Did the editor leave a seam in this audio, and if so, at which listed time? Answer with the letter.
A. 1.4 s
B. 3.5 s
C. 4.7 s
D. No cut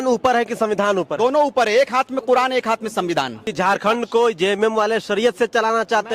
B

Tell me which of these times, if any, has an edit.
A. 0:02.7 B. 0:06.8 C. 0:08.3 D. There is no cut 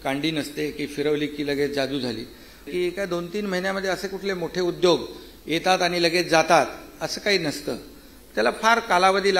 A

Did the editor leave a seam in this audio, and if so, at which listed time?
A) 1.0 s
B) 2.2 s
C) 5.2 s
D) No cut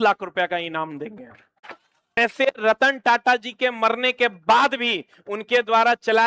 B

